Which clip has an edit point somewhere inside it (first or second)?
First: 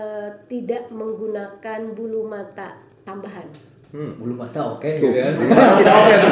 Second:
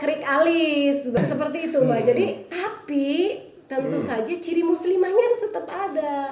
second